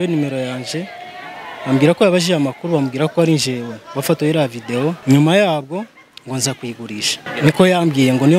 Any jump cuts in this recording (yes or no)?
yes